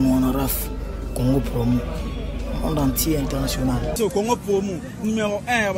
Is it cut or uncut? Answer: cut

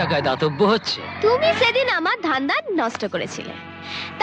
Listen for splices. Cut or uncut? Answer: cut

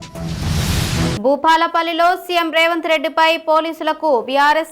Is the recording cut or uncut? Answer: uncut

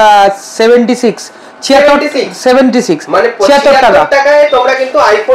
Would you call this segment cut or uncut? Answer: uncut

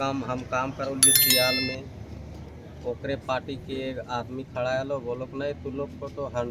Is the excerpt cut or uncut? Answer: uncut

